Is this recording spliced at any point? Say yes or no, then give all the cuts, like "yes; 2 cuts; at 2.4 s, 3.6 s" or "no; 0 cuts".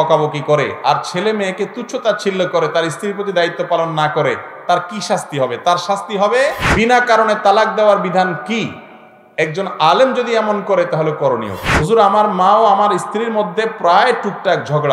yes; 2 cuts; at 6.6 s, 11.6 s